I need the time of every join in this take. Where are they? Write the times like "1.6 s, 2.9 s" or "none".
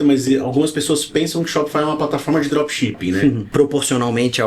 3.4 s